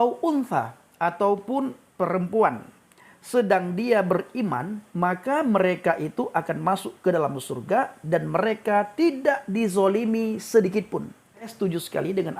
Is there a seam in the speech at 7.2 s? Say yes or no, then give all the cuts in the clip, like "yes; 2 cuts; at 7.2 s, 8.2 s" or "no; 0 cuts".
no; 1 cut; at 11.5 s